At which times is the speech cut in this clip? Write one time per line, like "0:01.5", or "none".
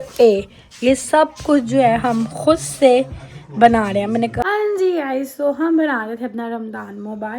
0:04.4